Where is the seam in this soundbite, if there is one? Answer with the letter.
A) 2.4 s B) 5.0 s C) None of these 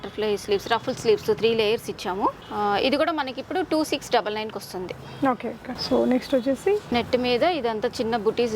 C